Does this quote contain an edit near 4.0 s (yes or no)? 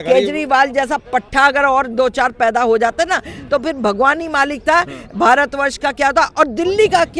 no